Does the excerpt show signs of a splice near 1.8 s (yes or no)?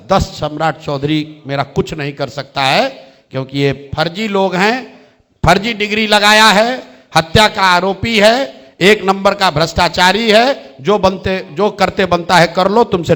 no